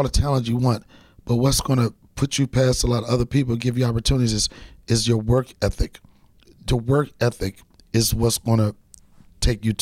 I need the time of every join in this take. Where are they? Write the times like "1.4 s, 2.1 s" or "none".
6.5 s